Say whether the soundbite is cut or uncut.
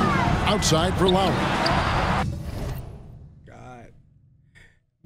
uncut